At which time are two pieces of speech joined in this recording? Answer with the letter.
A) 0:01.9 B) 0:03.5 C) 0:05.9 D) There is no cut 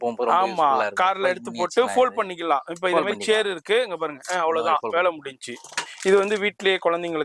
C